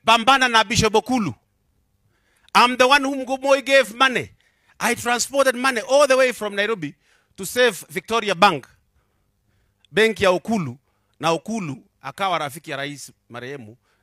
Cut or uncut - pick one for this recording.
uncut